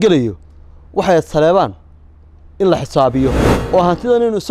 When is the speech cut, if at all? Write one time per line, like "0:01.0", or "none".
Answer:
0:03.5